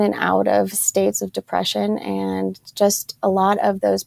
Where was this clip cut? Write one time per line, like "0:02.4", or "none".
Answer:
none